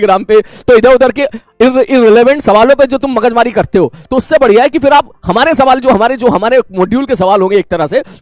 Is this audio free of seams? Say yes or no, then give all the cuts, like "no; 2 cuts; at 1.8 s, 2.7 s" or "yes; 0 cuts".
yes; 0 cuts